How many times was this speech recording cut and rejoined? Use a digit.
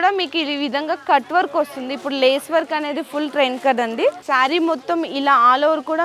1